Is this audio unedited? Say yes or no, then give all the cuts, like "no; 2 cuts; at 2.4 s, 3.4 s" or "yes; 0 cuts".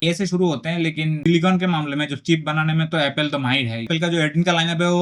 no; 2 cuts; at 1.2 s, 3.9 s